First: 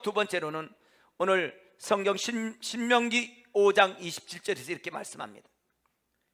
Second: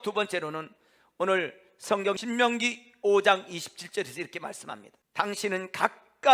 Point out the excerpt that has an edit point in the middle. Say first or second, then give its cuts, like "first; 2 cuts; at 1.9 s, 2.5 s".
second; 2 cuts; at 2.2 s, 4.9 s